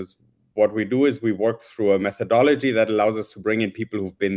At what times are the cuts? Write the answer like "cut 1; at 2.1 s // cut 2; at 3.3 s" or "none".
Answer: none